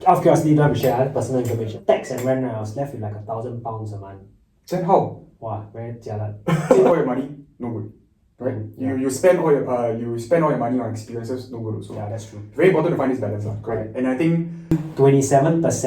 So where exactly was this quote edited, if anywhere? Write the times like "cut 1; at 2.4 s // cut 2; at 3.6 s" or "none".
cut 1; at 1.7 s // cut 2; at 6.7 s // cut 3; at 14.7 s